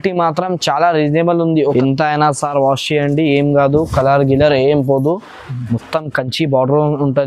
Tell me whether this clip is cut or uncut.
cut